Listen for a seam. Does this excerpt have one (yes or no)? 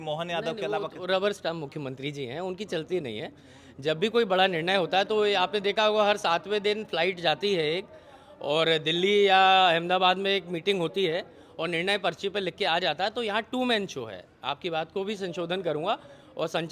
no